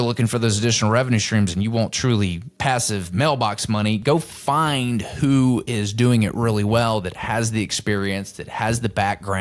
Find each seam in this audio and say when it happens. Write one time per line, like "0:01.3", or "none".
0:02.5